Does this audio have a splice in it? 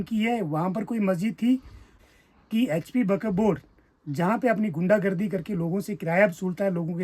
yes; 1 cut; at 2.0 s

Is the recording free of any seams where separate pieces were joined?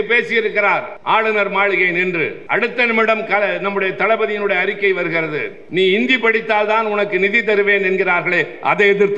no; 3 cuts; at 0.9 s, 2.4 s, 5.6 s

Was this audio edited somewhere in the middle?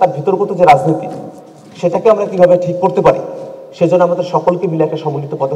no; 0 cuts

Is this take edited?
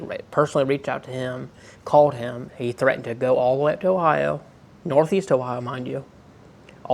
yes; 1 cut; at 2.5 s

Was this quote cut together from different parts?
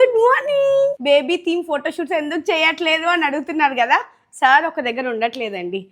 yes; 1 cut; at 1.0 s

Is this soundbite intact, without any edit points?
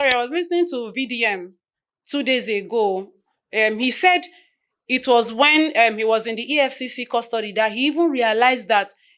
yes; 0 cuts

